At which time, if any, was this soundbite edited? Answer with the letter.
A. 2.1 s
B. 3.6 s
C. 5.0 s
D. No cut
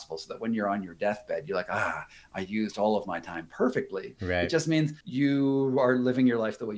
C